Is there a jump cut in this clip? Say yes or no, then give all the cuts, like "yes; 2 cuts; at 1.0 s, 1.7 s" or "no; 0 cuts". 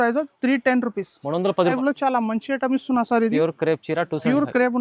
yes; 1 cut; at 1.7 s